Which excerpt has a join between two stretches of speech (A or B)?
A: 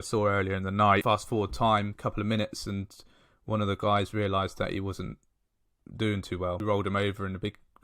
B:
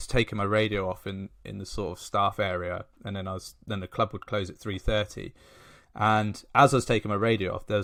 A